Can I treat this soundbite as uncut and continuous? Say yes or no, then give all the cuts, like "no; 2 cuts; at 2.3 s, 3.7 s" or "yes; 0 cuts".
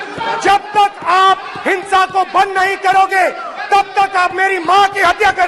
yes; 0 cuts